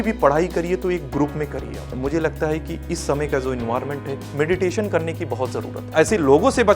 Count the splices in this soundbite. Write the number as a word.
two